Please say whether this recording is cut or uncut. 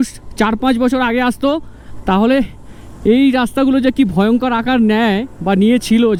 uncut